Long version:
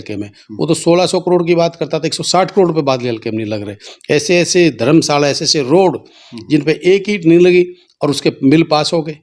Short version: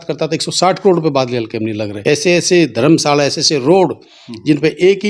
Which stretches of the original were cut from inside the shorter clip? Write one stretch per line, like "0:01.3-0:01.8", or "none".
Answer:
0:03.6-0:03.9